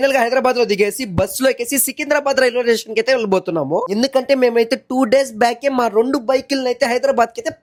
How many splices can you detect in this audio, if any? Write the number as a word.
zero